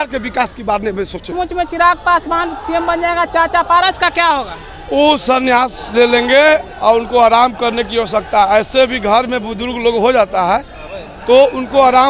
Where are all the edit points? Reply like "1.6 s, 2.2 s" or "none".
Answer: 1.3 s